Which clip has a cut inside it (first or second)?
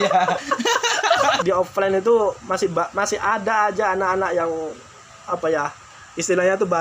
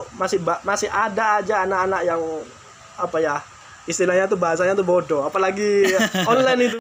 first